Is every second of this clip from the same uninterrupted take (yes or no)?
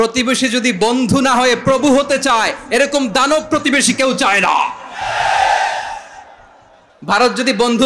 yes